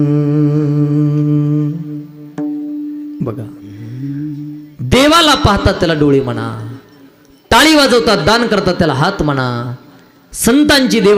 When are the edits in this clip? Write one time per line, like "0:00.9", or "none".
none